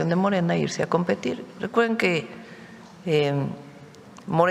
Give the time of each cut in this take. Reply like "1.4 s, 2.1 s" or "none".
none